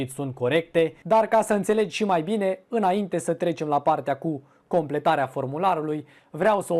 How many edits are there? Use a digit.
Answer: 1